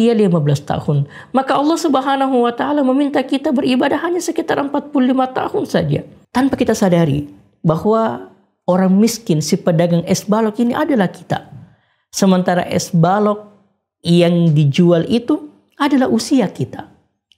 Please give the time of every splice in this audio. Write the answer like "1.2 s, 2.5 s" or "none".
6.2 s